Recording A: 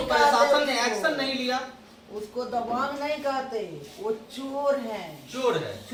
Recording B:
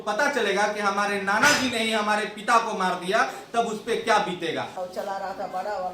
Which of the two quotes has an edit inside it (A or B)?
B